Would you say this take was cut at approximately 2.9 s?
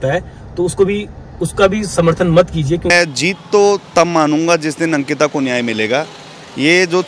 yes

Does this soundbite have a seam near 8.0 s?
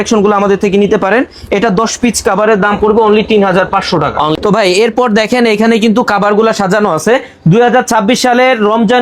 no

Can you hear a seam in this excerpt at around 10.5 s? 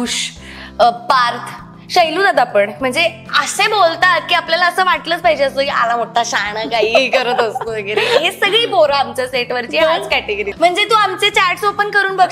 yes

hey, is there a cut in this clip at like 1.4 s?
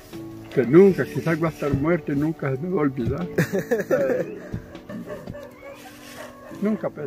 no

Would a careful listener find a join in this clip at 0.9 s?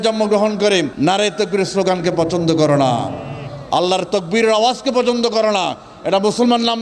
yes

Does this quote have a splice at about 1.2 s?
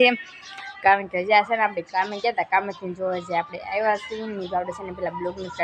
no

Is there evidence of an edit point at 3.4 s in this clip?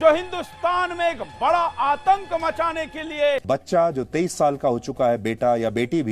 yes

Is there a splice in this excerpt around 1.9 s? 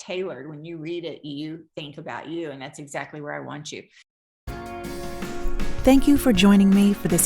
no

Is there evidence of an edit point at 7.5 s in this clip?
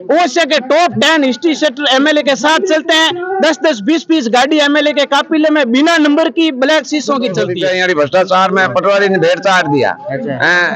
yes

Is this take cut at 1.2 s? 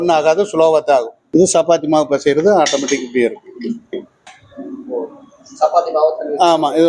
yes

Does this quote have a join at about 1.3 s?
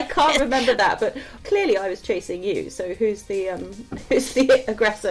yes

